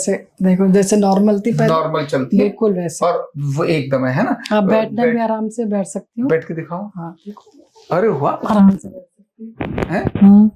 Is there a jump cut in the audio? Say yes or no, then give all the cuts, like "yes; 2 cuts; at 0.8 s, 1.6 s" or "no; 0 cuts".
no; 0 cuts